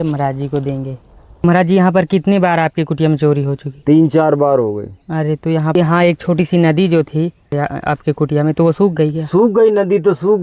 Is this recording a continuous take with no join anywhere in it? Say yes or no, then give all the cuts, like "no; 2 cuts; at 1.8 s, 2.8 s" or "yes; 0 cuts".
no; 3 cuts; at 1.4 s, 5.7 s, 7.5 s